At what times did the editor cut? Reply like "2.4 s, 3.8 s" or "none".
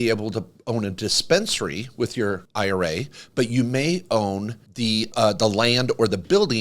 2.4 s, 5.0 s